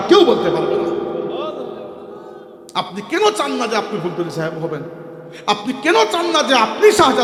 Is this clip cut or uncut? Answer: uncut